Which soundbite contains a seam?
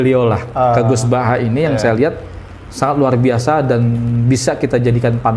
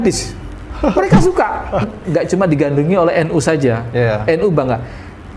second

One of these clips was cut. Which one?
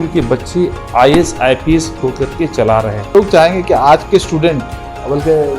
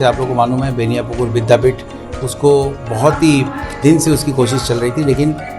first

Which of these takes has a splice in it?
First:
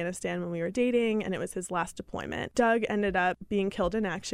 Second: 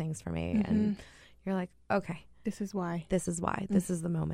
first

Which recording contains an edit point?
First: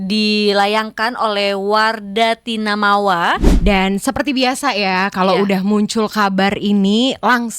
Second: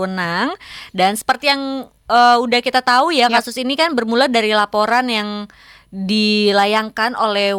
first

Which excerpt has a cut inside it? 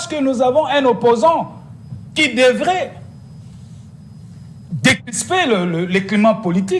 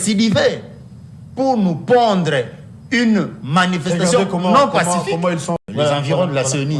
second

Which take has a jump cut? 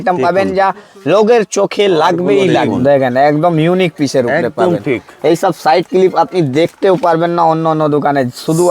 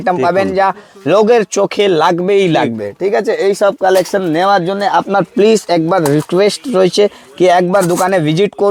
first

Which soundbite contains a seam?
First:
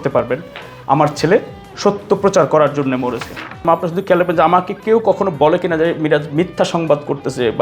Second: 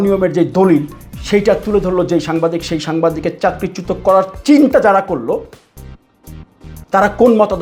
first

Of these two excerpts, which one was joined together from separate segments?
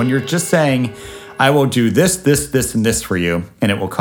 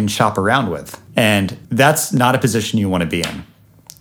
second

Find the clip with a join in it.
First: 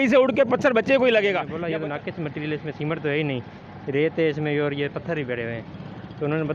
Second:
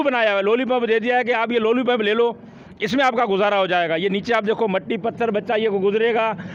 first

